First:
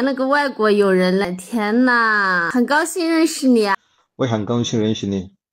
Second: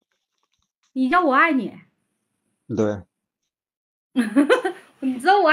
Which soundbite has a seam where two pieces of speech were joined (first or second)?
first